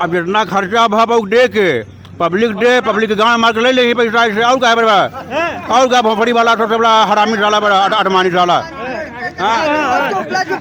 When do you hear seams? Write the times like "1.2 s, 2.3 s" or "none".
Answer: none